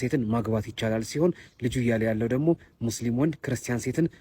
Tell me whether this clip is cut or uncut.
uncut